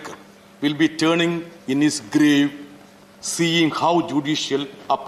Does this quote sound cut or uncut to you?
uncut